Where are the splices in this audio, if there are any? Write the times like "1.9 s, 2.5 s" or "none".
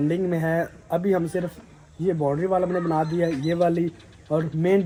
none